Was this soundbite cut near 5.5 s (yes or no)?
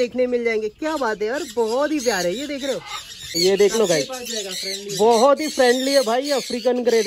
no